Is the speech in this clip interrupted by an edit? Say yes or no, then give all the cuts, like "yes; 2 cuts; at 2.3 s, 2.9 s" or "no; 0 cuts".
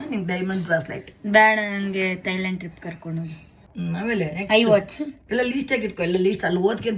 yes; 1 cut; at 3.7 s